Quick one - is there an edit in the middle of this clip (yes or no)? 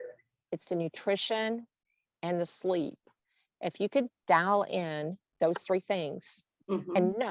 no